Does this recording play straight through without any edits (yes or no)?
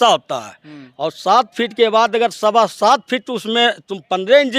yes